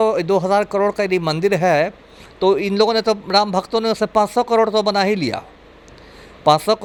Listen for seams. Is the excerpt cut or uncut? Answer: uncut